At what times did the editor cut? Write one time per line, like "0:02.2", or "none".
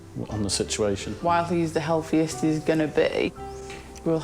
0:01.1